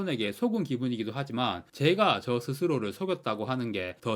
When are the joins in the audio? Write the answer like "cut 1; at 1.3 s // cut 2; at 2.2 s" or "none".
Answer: none